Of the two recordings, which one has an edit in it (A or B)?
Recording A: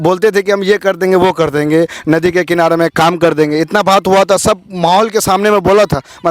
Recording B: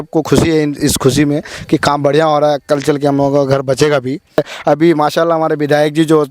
B